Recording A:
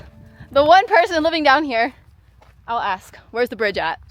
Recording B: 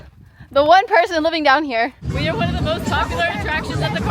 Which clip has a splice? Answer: B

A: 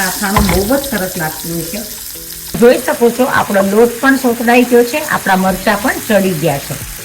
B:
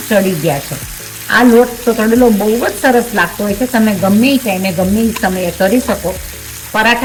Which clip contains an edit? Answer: A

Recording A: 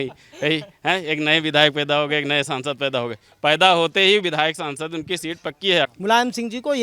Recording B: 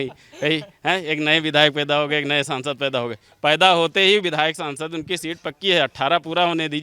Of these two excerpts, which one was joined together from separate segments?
A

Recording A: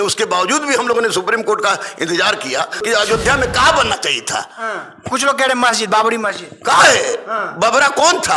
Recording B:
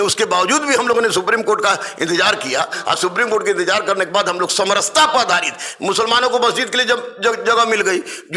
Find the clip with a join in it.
A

